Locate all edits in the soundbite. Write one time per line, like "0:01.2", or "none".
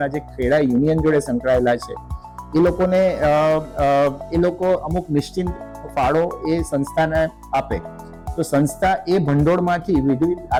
none